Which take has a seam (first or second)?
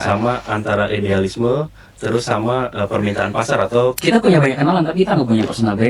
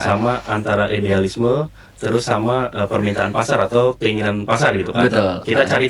first